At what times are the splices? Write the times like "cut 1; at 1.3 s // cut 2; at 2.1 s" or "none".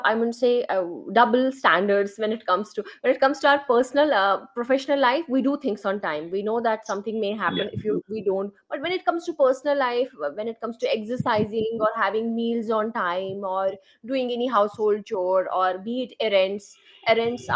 none